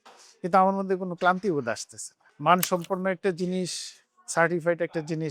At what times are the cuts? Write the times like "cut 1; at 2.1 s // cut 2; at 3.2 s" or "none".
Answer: cut 1; at 2.2 s